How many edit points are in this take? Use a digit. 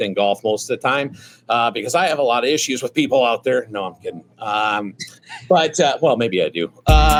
0